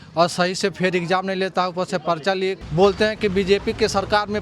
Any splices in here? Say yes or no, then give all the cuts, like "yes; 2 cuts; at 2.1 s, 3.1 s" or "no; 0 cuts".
yes; 1 cut; at 2.6 s